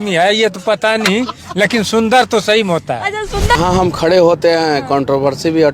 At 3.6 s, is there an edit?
yes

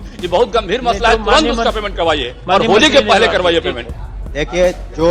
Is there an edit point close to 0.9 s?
no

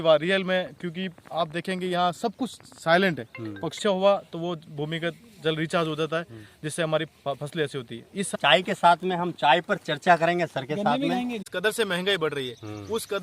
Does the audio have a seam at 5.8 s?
no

